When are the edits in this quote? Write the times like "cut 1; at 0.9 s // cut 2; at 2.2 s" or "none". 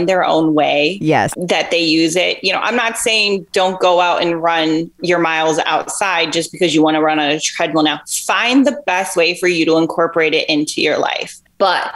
cut 1; at 1.3 s // cut 2; at 5.0 s